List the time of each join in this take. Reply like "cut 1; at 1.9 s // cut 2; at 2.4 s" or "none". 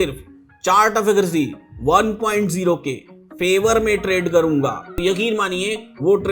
cut 1; at 4.9 s